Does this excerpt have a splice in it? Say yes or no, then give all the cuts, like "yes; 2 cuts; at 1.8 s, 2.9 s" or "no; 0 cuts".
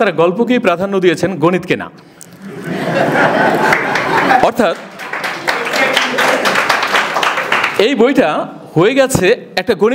no; 0 cuts